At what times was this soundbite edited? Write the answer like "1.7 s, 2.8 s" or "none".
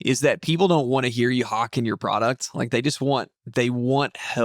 none